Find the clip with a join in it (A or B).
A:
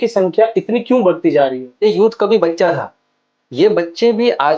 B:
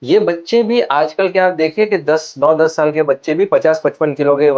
A